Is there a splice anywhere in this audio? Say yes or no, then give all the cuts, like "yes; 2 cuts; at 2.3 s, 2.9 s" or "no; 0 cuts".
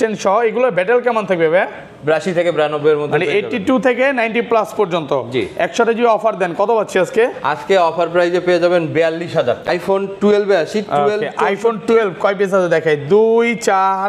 yes; 1 cut; at 9.6 s